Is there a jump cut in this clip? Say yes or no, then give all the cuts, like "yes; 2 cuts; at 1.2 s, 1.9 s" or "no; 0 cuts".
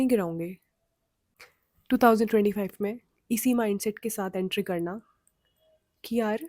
yes; 1 cut; at 1.1 s